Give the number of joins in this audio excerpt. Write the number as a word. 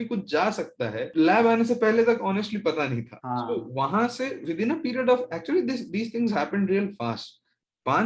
zero